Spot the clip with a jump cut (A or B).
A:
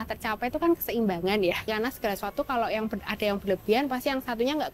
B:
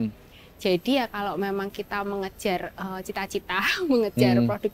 A